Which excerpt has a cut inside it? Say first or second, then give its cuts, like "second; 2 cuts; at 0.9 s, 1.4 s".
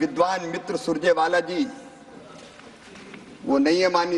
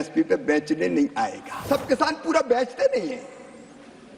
second; 1 cut; at 1.6 s